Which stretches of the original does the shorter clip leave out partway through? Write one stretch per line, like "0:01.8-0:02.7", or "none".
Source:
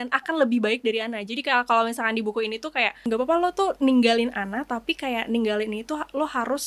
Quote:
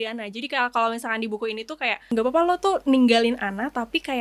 none